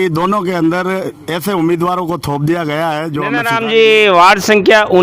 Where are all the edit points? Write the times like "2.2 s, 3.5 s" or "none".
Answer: 3.5 s